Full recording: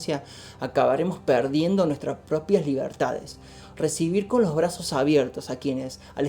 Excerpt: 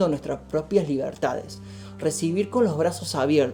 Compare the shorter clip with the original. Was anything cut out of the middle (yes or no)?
no